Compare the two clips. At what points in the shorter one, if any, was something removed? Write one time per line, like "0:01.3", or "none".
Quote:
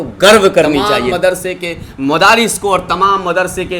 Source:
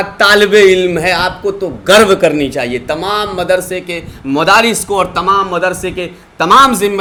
0:01.0

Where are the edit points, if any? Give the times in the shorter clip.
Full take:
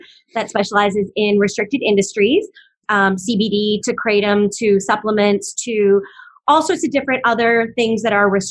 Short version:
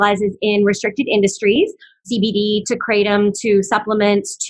0:02.0

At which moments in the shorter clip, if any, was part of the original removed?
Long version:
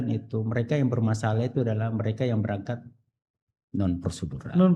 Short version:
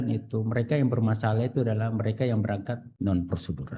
0:02.9

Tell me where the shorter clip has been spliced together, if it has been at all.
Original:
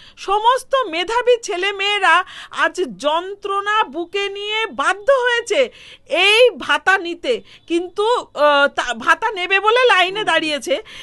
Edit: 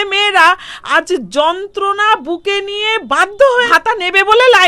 0:03.7

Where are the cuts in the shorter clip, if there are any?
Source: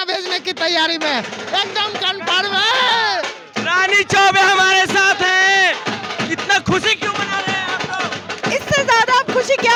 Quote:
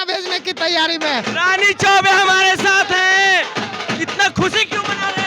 0:01.3

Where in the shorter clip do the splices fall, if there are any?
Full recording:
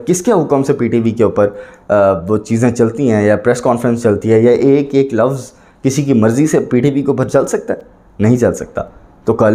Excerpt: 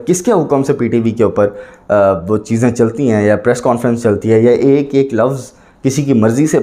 none

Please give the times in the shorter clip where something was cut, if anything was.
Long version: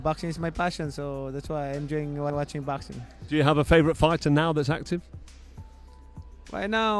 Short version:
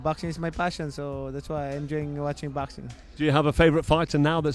0:02.3

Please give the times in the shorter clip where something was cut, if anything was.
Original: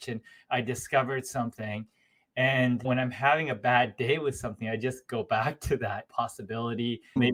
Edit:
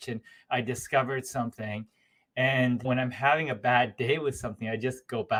none

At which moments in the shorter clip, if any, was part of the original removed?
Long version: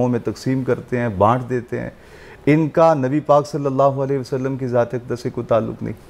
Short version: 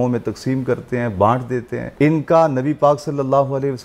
0:01.8

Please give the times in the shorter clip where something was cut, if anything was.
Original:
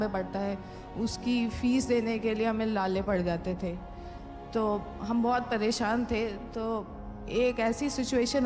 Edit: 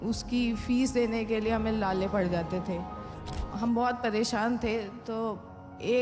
0:03.4

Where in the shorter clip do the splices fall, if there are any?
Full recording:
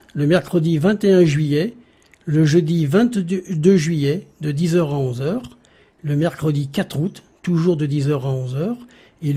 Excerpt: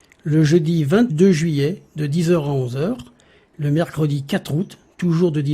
0:01.1

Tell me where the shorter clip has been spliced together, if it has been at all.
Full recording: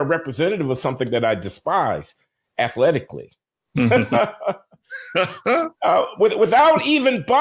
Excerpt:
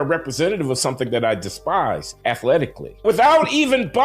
0:02.1
0:03.0

